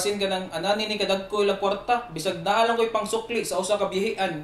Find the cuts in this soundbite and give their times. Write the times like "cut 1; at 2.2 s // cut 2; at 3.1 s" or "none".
none